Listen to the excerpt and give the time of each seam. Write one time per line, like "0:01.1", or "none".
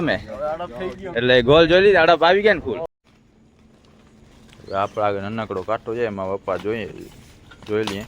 0:02.9